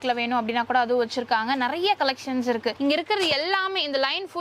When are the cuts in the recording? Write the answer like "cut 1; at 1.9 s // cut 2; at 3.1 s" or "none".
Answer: cut 1; at 2.8 s

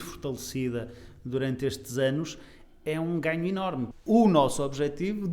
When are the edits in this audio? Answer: cut 1; at 3.9 s

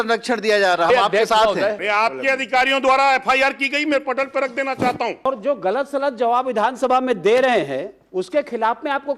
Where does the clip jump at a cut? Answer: cut 1; at 1.8 s // cut 2; at 5.3 s

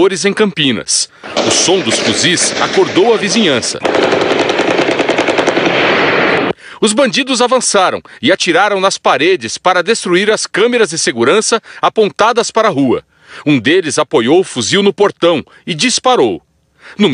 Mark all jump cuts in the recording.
none

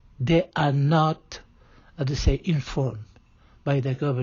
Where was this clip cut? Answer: none

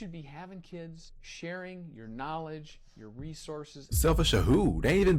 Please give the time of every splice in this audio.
cut 1; at 3.9 s

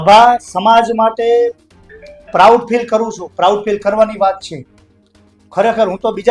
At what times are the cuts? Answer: none

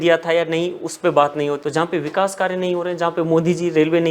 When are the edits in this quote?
cut 1; at 1.6 s

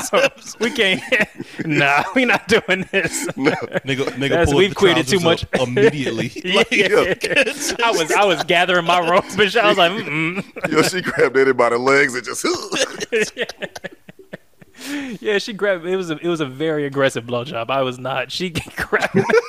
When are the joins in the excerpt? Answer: none

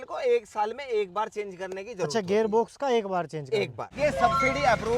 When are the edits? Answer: cut 1; at 3.9 s

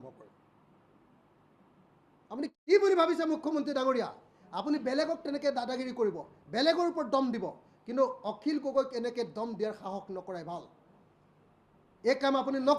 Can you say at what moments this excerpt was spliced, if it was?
cut 1; at 2.5 s

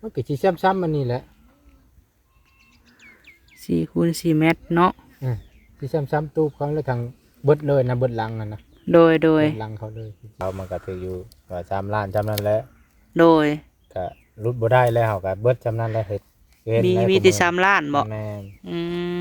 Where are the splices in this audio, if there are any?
cut 1; at 10.4 s

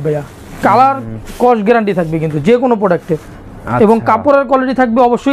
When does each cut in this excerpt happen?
none

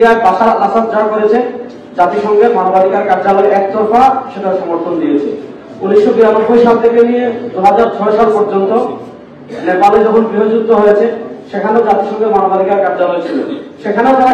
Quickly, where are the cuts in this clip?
none

